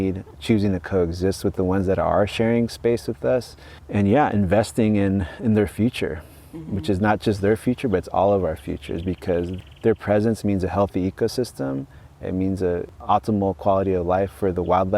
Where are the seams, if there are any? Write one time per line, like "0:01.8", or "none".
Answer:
0:09.6
0:13.0